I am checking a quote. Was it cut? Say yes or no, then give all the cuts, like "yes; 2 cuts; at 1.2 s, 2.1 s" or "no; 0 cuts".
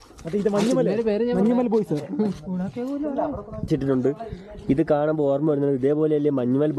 yes; 1 cut; at 3.7 s